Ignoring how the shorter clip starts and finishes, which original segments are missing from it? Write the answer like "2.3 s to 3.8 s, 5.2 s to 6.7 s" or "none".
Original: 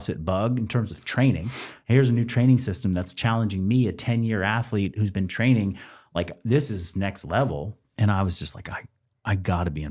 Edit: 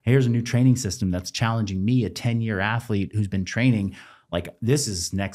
none